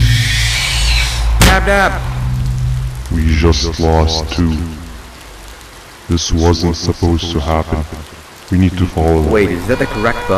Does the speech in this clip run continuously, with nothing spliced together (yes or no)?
yes